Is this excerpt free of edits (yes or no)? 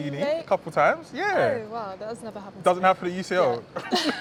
yes